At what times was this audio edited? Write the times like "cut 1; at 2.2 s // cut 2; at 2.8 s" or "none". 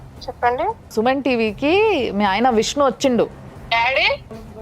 cut 1; at 3.5 s